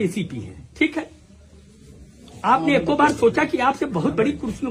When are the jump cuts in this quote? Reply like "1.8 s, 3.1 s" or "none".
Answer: none